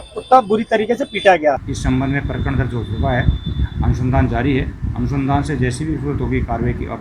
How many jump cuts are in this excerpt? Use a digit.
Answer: 1